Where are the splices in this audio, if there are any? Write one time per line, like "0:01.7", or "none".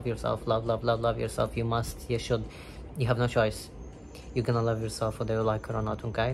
none